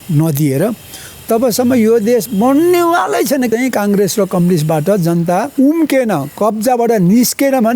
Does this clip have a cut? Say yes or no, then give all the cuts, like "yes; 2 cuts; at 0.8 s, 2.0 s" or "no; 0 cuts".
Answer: yes; 3 cuts; at 3.5 s, 5.5 s, 6.3 s